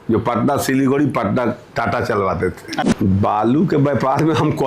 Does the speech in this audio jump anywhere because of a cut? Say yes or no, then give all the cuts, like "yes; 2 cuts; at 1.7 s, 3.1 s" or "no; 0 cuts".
yes; 1 cut; at 2.8 s